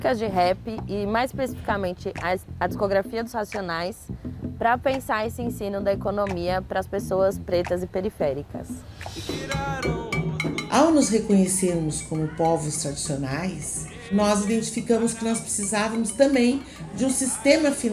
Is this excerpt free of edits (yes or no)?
no